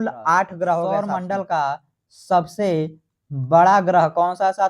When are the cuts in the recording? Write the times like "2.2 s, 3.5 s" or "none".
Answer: 0.9 s

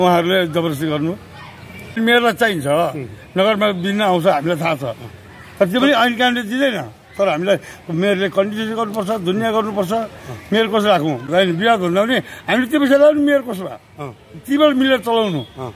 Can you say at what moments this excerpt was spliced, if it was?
2.0 s, 11.3 s

